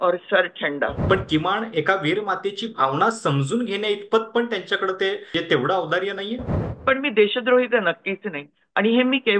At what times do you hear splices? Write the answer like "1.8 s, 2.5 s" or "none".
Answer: 1.0 s, 5.3 s, 6.6 s